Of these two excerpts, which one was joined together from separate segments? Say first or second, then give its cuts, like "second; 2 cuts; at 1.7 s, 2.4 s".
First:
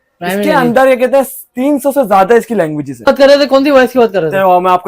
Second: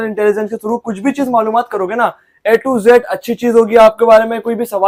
first; 1 cut; at 2.9 s